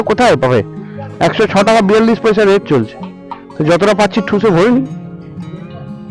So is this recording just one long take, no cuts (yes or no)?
yes